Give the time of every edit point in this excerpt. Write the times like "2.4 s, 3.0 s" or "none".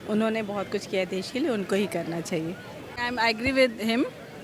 3.0 s